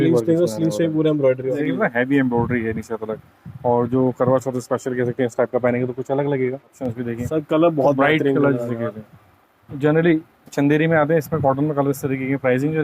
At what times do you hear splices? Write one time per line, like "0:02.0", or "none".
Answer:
0:01.6
0:06.8